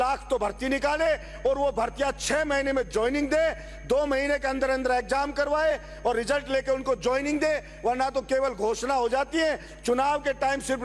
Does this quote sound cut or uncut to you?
uncut